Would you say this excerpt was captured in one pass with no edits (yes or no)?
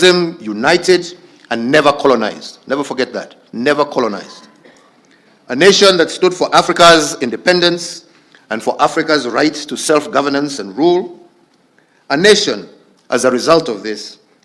yes